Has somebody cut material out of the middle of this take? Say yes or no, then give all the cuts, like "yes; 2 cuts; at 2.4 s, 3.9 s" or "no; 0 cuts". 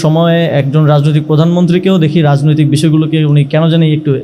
no; 0 cuts